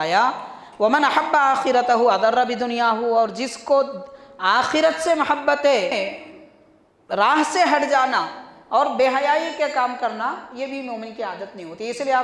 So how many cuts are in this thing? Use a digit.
1